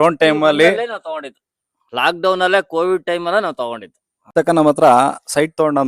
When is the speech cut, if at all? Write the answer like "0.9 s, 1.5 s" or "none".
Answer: 4.3 s